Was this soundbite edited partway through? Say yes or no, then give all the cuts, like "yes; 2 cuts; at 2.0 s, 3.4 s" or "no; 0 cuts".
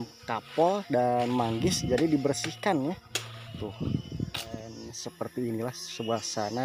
yes; 1 cut; at 4.9 s